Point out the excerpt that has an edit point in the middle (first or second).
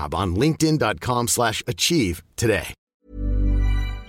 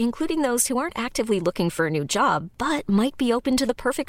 first